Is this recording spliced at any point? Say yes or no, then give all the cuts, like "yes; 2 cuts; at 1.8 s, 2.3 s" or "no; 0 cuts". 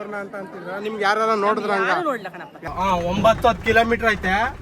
yes; 1 cut; at 2.7 s